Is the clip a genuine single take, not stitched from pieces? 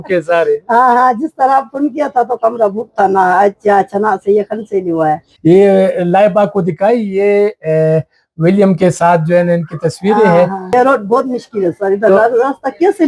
no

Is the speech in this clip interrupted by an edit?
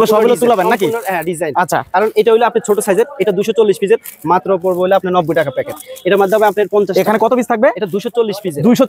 no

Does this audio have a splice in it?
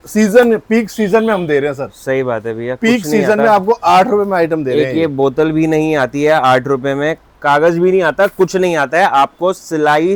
no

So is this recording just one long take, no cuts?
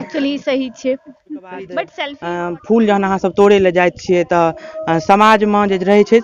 no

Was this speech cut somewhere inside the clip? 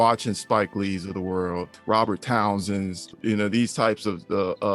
yes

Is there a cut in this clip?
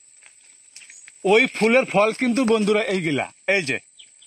no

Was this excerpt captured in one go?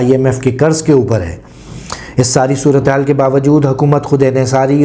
yes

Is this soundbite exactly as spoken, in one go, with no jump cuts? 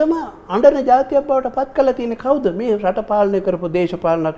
yes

